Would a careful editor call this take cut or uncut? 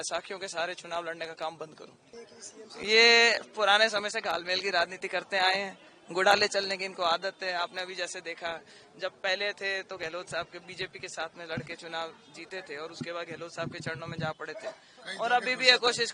cut